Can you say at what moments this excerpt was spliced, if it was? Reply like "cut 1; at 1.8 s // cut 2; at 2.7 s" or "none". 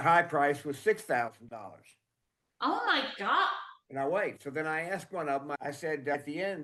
none

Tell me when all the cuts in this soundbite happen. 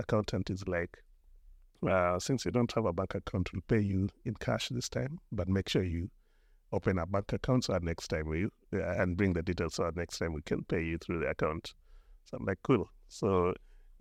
none

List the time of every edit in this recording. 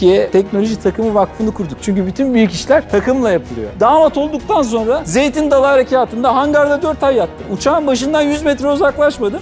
cut 1; at 3.7 s

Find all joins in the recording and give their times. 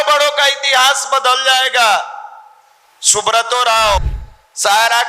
cut 1; at 4.1 s

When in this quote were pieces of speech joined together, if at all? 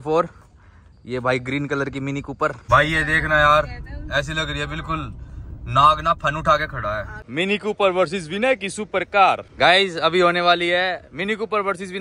cut 1; at 2.6 s // cut 2; at 7.2 s // cut 3; at 9.5 s

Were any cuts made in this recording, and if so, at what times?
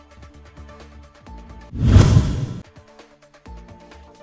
cut 1; at 1.7 s

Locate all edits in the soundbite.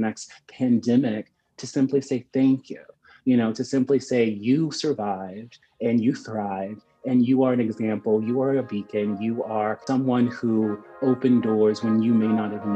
cut 1; at 9.8 s

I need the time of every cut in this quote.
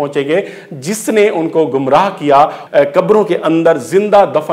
none

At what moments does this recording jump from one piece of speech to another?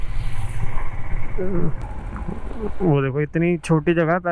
cut 1; at 1.8 s

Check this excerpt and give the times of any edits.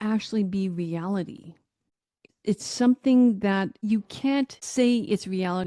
cut 1; at 2.2 s // cut 2; at 3.7 s

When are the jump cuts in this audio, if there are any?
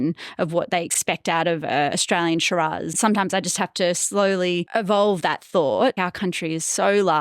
cut 1; at 1.0 s // cut 2; at 2.9 s // cut 3; at 4.7 s // cut 4; at 6.0 s

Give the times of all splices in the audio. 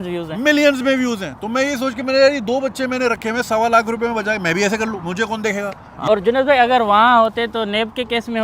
cut 1; at 5.9 s

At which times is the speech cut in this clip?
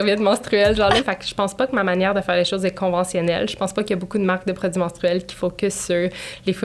cut 1; at 1.0 s

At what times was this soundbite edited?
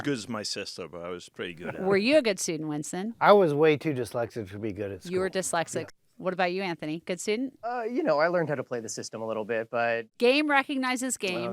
cut 1; at 5.9 s // cut 2; at 7.7 s // cut 3; at 10.1 s

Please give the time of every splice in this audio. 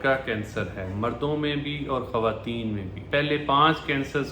cut 1; at 3.0 s

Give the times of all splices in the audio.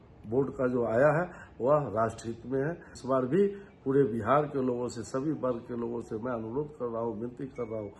cut 1; at 2.9 s

